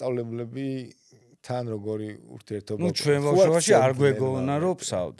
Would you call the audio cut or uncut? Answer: uncut